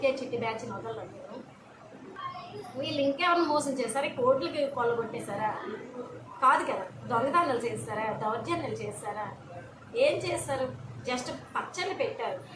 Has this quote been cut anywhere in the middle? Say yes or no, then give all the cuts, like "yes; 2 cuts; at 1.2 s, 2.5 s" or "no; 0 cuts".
yes; 1 cut; at 2.2 s